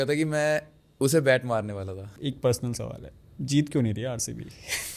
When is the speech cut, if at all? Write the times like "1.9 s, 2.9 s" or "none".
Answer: 2.0 s